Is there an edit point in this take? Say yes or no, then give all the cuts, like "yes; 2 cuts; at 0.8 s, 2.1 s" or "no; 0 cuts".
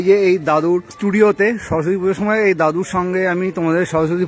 no; 0 cuts